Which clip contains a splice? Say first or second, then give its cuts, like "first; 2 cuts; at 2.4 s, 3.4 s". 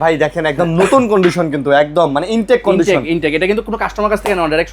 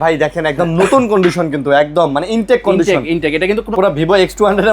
second; 1 cut; at 3.7 s